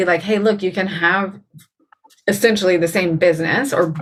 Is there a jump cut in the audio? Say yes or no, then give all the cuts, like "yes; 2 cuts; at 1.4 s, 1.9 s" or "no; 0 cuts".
no; 0 cuts